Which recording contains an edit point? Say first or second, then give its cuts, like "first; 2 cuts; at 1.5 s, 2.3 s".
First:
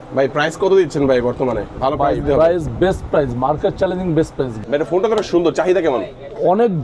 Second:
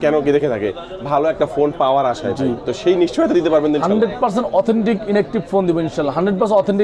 first; 1 cut; at 4.5 s